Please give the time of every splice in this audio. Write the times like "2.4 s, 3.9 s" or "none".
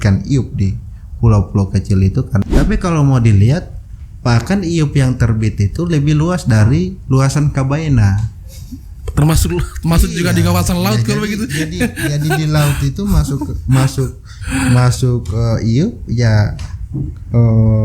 2.4 s